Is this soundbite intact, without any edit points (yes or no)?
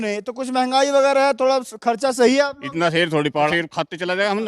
no